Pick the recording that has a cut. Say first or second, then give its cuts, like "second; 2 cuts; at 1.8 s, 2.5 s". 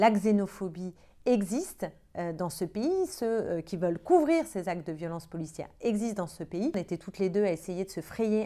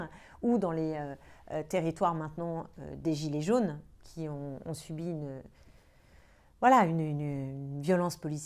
first; 1 cut; at 6.7 s